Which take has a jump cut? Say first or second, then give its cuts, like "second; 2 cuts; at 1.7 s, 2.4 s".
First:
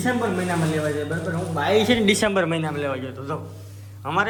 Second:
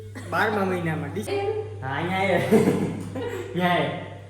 second; 1 cut; at 1.2 s